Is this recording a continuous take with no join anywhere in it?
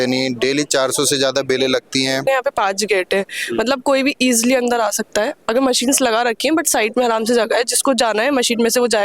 no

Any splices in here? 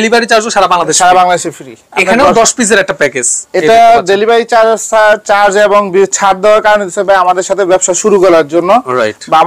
no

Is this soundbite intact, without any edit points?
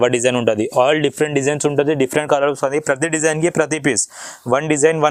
yes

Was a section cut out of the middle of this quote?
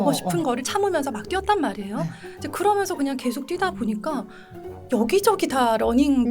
no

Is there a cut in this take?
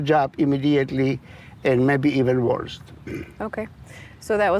no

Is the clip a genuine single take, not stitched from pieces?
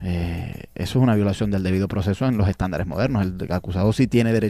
no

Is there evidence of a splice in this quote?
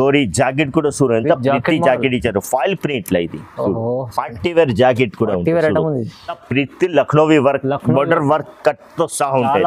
yes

